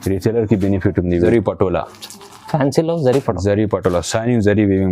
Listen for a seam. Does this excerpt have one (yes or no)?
yes